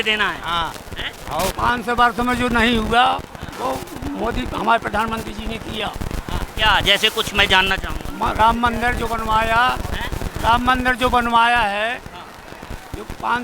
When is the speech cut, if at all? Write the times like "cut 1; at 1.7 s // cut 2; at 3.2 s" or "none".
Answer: cut 1; at 1.5 s